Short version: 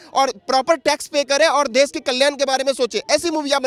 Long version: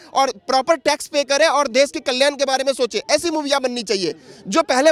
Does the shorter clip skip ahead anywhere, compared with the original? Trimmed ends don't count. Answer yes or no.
no